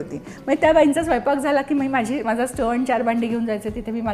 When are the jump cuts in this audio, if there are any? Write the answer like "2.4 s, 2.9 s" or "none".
none